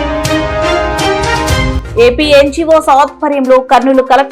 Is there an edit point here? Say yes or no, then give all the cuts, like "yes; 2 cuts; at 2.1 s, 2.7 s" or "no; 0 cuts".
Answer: yes; 1 cut; at 1.8 s